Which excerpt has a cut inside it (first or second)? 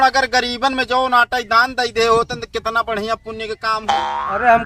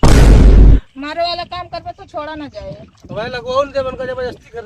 second